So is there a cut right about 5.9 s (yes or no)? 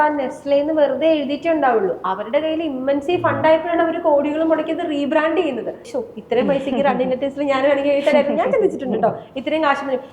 yes